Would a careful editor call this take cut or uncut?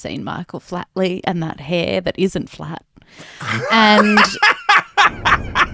uncut